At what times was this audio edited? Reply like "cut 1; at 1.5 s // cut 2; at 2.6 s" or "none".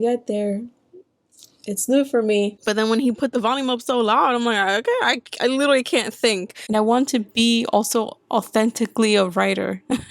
cut 1; at 2.6 s // cut 2; at 6.5 s